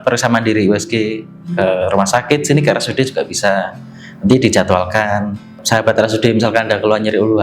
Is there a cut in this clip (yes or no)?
yes